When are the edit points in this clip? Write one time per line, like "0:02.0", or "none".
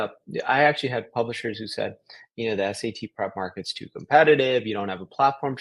none